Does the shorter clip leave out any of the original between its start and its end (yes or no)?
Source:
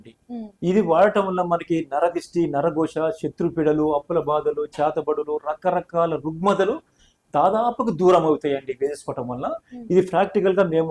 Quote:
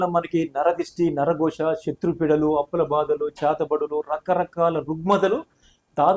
no